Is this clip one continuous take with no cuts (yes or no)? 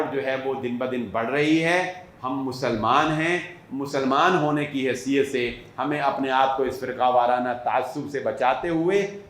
yes